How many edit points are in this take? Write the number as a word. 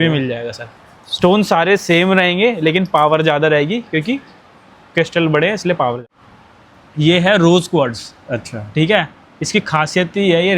one